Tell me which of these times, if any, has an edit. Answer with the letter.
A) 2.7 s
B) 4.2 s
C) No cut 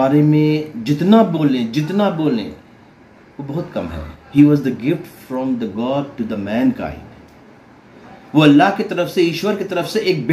B